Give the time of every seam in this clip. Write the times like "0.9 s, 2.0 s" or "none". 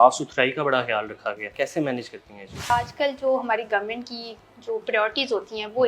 1.5 s, 2.7 s